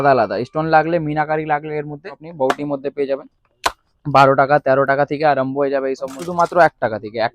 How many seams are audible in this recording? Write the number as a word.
two